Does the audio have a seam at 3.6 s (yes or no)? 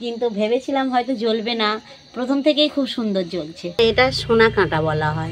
yes